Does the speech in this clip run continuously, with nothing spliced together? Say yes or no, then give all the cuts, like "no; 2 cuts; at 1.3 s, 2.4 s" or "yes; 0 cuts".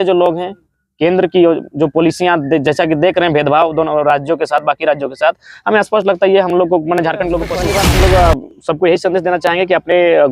no; 1 cut; at 7.6 s